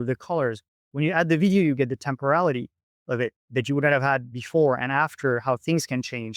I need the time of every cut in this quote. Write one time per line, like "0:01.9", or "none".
0:04.3